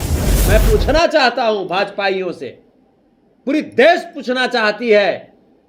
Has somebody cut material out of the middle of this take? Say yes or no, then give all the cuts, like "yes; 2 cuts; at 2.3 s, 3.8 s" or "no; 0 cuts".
no; 0 cuts